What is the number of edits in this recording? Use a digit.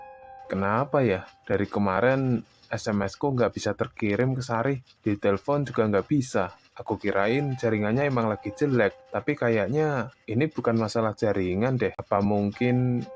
1